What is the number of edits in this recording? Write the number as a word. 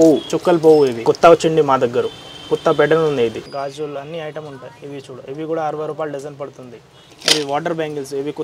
three